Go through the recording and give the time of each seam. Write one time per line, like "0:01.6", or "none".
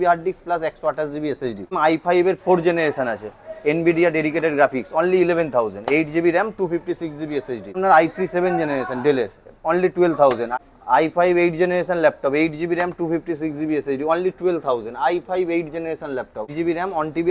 0:01.7
0:07.8
0:10.5
0:16.5

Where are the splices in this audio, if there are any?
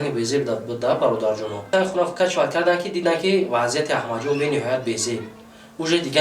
0:01.7

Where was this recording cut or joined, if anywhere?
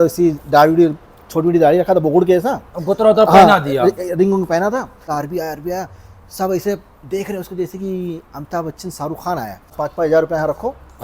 0:05.0
0:09.7

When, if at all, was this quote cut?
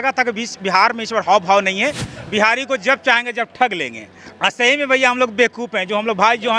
0:02.1

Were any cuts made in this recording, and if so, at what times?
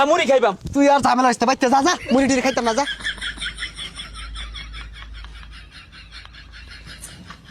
none

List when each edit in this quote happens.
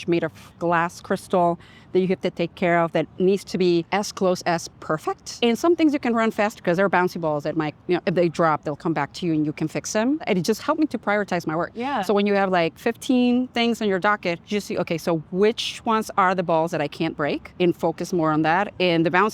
0:03.9
0:05.3
0:10.2
0:14.4
0:17.5

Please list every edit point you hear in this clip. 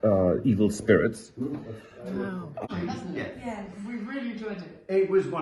0:02.7

